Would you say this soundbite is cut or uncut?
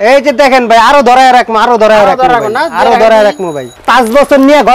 cut